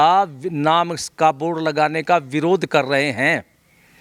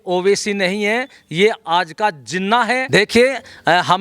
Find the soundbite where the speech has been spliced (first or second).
second